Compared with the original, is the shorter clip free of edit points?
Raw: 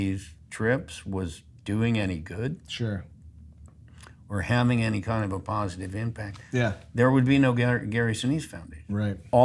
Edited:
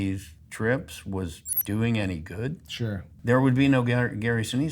no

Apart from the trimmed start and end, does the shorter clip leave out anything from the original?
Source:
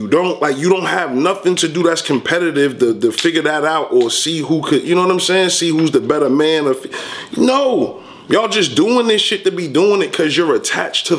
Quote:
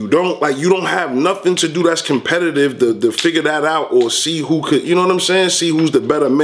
no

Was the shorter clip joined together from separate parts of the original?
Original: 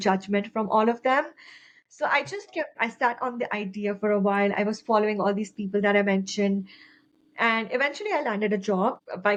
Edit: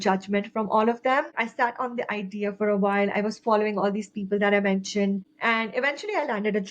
yes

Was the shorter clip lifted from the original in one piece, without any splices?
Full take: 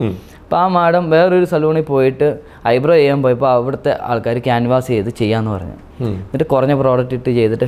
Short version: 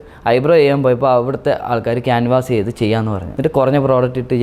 no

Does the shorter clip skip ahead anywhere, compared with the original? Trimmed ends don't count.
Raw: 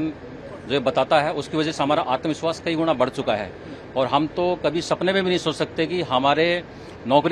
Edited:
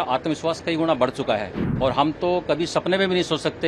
yes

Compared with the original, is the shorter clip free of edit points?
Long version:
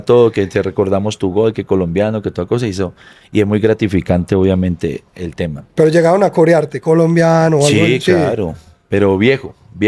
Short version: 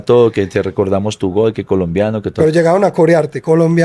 no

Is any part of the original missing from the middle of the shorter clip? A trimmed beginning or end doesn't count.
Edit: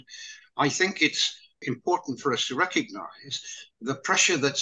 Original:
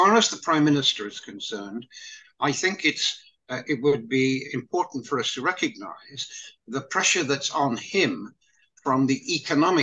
yes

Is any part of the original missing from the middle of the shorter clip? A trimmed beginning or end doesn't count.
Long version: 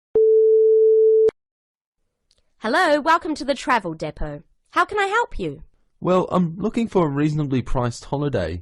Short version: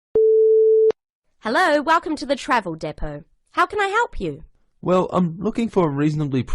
yes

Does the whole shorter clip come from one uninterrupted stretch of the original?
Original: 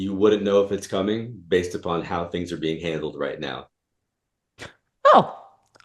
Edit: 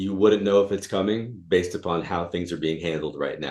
yes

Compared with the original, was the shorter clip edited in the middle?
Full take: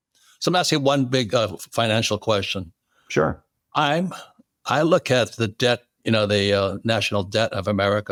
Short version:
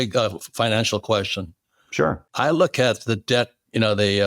yes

